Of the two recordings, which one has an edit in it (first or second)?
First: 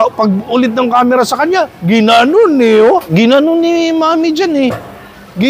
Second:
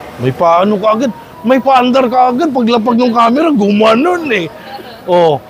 first